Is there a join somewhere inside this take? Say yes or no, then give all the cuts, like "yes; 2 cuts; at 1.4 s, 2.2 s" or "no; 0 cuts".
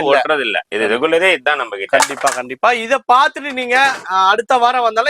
no; 0 cuts